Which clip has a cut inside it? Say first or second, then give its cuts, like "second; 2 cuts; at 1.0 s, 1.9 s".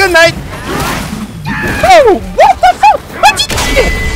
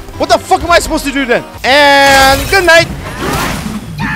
second; 1 cut; at 1.5 s